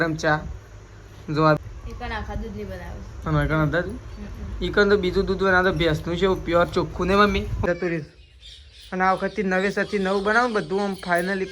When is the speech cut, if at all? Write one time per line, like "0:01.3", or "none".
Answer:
0:01.6
0:07.7

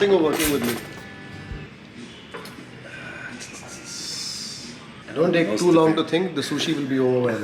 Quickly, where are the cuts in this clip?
none

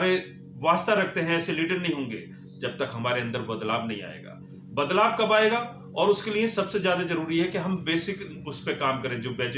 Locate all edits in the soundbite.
none

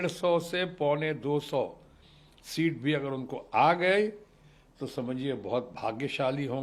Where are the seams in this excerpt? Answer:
none

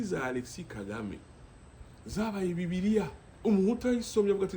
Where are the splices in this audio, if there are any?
0:03.2

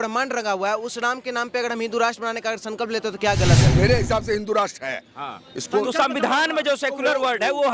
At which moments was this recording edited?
0:03.7

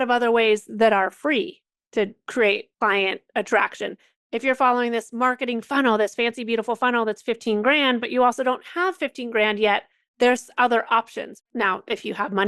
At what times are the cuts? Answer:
0:11.3

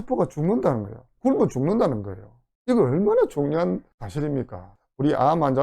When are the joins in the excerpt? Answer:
0:04.7

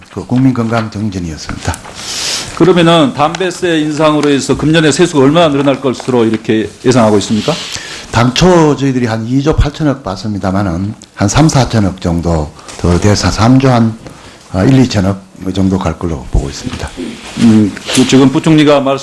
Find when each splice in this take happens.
none

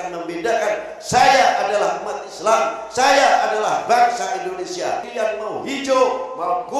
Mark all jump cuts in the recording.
0:05.1

